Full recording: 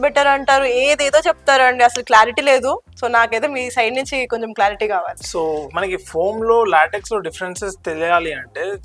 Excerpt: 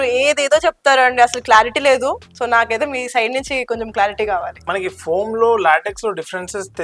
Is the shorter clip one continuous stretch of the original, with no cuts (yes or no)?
no